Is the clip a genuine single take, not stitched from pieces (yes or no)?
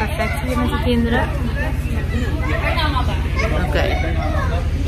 yes